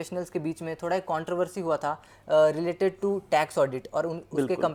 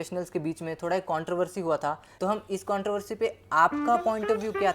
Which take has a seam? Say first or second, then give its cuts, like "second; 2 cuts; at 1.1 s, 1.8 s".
second; 1 cut; at 2.1 s